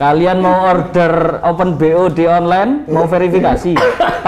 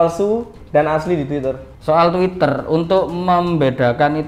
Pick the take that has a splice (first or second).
second